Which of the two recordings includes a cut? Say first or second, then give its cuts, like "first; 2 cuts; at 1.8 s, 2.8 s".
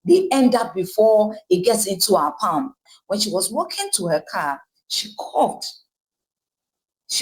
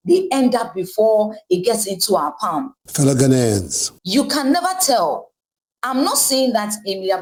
first; 1 cut; at 2.8 s